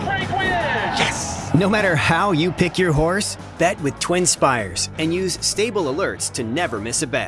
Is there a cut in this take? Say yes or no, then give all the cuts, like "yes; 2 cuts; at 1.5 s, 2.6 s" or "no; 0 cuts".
no; 0 cuts